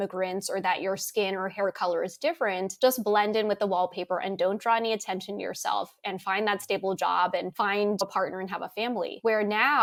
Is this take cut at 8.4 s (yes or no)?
no